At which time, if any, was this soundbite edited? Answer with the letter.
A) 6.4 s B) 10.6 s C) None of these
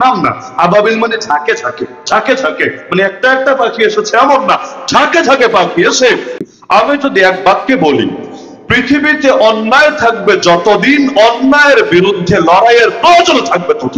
A